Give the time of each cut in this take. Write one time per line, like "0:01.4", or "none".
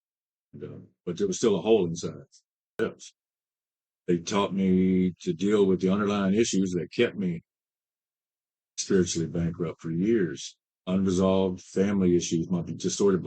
0:02.8